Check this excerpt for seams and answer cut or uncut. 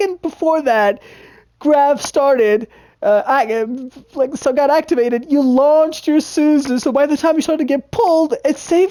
uncut